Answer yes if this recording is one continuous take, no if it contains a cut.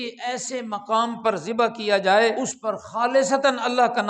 no